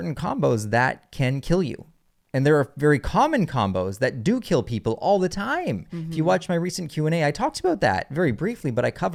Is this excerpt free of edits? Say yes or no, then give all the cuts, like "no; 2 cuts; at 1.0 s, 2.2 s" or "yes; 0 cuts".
yes; 0 cuts